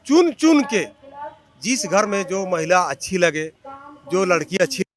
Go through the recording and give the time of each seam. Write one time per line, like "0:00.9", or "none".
none